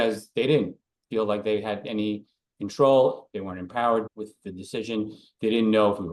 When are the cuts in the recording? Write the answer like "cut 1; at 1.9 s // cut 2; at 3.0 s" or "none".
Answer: cut 1; at 4.1 s